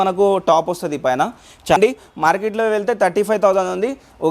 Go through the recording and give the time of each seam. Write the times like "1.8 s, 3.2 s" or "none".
1.8 s